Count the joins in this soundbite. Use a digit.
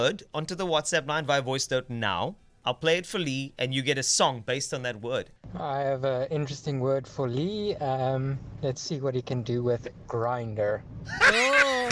1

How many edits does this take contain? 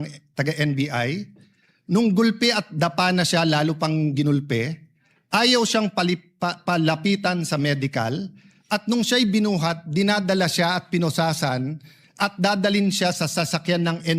0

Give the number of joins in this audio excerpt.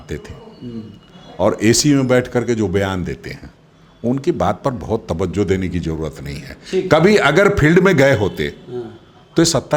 0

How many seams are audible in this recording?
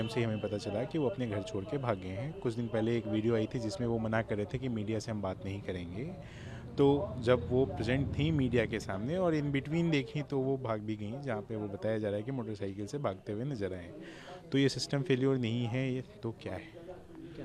0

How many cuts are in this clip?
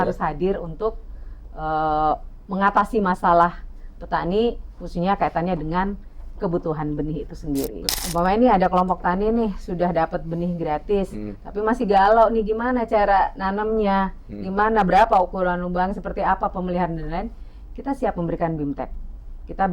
1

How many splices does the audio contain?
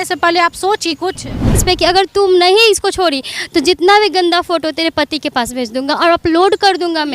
1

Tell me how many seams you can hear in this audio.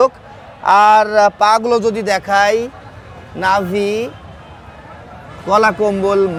0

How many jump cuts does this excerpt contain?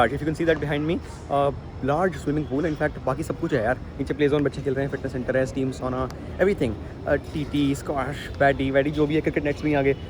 0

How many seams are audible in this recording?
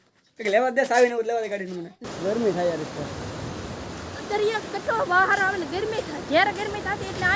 1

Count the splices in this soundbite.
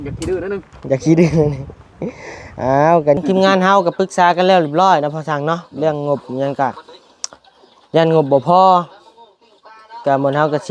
1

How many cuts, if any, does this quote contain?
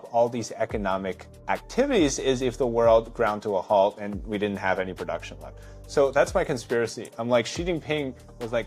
1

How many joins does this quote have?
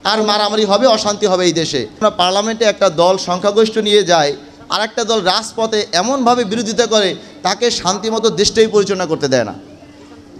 1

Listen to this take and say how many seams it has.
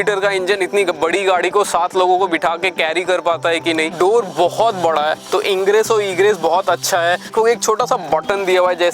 2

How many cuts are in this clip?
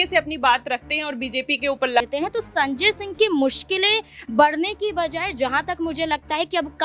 1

